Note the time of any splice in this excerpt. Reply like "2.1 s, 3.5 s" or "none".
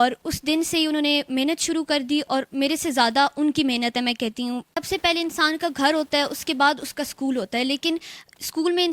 4.8 s

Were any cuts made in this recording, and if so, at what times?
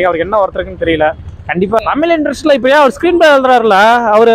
1.8 s

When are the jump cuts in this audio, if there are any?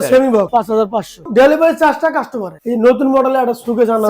1.0 s, 2.6 s

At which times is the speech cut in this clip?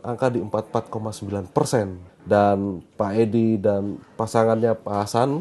2.0 s

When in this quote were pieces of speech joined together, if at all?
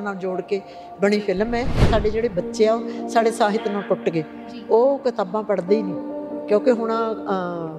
1.8 s

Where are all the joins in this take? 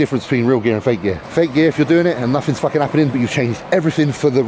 1.2 s

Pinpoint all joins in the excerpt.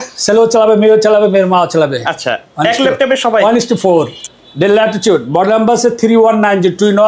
none

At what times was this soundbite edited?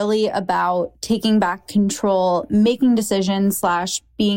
1.0 s

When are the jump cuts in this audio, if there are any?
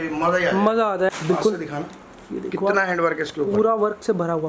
1.1 s

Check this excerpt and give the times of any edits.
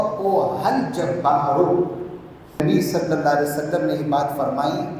2.6 s

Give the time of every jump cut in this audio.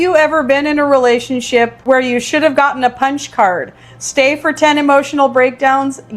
1.8 s

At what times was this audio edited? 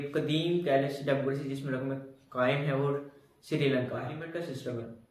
4.2 s

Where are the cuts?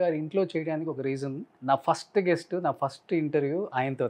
1.5 s

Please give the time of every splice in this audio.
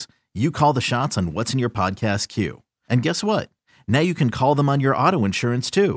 none

